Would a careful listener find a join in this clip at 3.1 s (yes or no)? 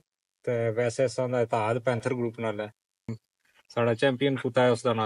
yes